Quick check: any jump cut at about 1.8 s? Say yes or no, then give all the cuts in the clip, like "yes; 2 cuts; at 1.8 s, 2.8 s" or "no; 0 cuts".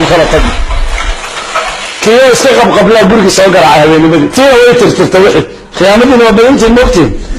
yes; 1 cut; at 1.8 s